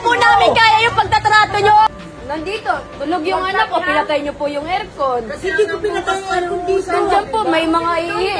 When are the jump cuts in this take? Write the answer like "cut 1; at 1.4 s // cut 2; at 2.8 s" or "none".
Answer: cut 1; at 1.9 s